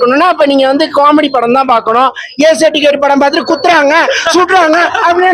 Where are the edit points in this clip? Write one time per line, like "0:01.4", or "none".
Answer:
none